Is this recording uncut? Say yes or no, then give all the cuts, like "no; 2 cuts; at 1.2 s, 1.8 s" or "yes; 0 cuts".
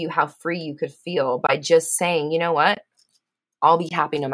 yes; 0 cuts